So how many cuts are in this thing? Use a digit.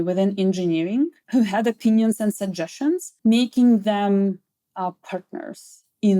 2